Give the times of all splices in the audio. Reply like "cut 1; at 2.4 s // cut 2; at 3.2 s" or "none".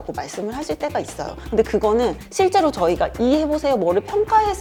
none